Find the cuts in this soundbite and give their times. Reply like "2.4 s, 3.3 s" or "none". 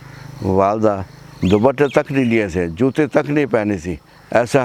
none

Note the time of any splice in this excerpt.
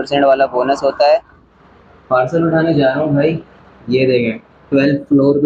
1.5 s

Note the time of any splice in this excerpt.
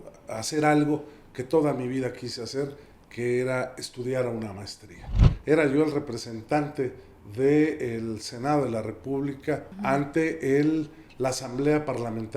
5.3 s, 9.7 s

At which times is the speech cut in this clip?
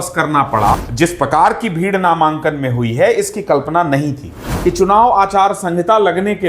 0.9 s, 4.5 s

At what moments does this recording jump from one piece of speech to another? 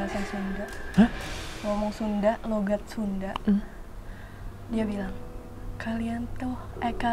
none

